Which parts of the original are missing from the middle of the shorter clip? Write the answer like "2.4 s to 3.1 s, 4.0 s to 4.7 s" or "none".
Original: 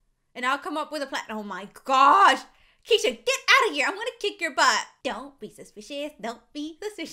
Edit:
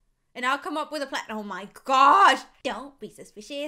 2.5 s to 4.9 s